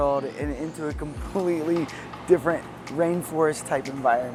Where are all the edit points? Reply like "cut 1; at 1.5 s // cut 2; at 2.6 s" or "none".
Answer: none